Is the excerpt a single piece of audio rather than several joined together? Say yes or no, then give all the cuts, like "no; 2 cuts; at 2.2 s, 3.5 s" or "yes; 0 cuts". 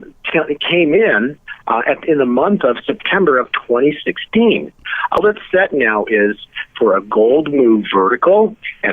no; 1 cut; at 5.2 s